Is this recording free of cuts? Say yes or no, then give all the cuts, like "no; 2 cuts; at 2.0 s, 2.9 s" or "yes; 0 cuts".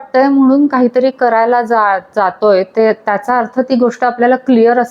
yes; 0 cuts